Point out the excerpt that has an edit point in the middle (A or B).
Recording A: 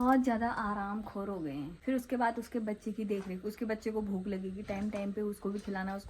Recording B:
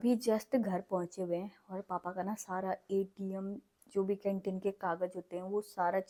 A